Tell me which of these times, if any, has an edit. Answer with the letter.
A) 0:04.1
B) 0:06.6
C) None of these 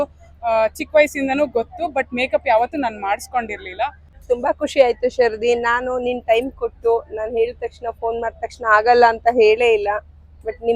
A